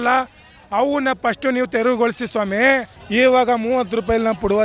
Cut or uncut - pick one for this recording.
cut